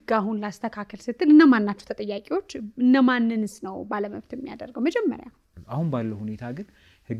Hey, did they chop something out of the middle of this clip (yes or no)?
yes